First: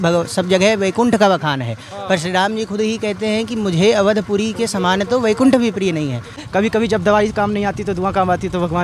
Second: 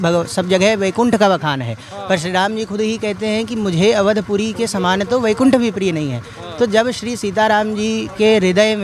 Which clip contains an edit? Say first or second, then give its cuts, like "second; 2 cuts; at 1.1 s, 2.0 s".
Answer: first; 1 cut; at 6.4 s